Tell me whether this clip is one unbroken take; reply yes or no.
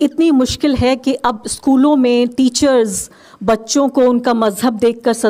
yes